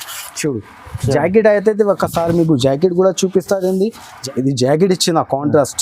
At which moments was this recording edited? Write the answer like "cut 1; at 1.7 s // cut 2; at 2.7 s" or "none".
cut 1; at 4.2 s

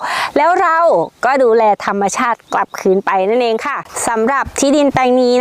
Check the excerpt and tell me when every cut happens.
cut 1; at 3.9 s

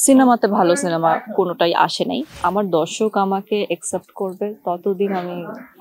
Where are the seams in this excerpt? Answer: cut 1; at 2.3 s

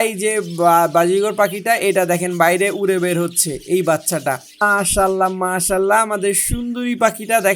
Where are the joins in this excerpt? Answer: cut 1; at 4.6 s

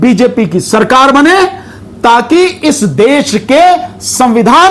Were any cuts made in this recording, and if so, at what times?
none

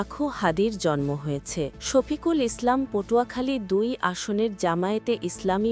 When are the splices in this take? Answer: cut 1; at 1.8 s

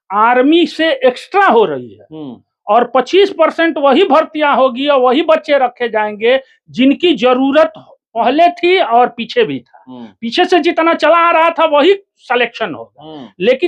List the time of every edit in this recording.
none

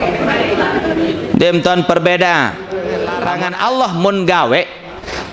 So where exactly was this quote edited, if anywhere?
cut 1; at 3.3 s

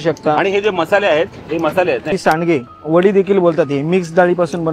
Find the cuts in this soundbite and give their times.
cut 1; at 2.1 s

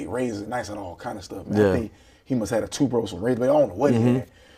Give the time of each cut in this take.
none

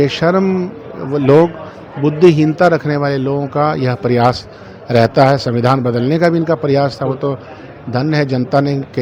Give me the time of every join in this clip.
none

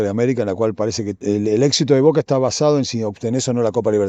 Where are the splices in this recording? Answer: cut 1; at 1.2 s

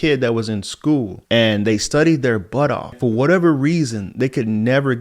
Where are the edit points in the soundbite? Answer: cut 1; at 1.2 s // cut 2; at 3.0 s

